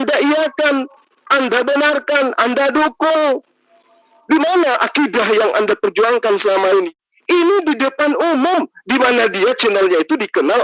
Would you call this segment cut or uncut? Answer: cut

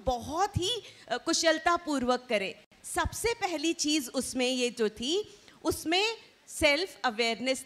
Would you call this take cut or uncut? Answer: uncut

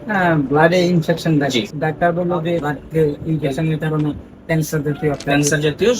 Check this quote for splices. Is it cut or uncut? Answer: cut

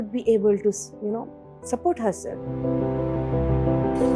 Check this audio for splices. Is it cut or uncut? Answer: cut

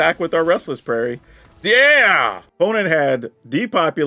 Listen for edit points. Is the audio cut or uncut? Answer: cut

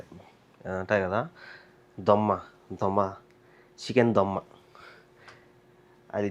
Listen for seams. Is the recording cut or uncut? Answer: uncut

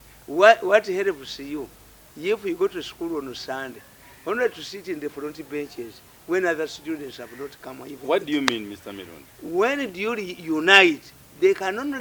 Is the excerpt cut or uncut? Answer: uncut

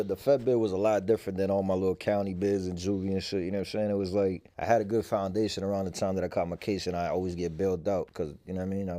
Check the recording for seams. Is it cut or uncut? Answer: uncut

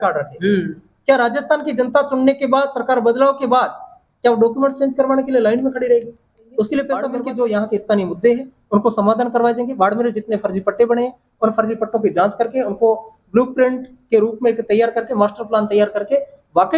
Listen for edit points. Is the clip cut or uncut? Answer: cut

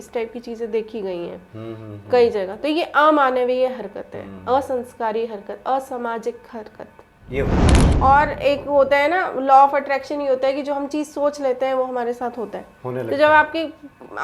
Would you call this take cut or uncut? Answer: cut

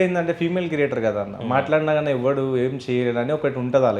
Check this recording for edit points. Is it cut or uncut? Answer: uncut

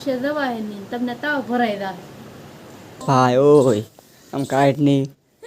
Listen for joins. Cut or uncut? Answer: cut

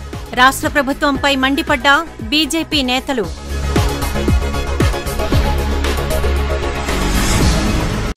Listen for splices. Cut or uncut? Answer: uncut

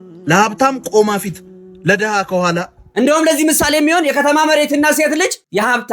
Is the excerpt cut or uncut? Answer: cut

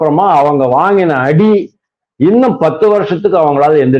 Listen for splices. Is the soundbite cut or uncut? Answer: uncut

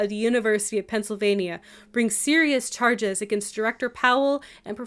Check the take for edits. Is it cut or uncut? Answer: uncut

